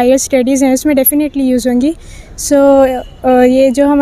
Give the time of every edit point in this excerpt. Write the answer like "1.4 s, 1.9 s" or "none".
none